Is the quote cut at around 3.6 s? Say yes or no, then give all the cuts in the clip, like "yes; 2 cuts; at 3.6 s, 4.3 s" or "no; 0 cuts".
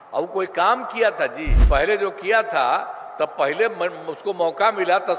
no; 1 cut; at 1.5 s